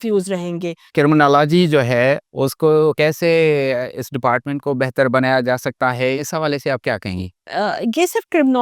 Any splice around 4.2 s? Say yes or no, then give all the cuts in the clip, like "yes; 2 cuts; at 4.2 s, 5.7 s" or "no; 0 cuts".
no; 5 cuts; at 0.8 s, 2.3 s, 3.0 s, 6.2 s, 7.4 s